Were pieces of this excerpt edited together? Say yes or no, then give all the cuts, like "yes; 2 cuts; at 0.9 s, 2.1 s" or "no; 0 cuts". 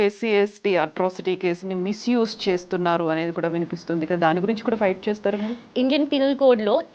yes; 1 cut; at 5.6 s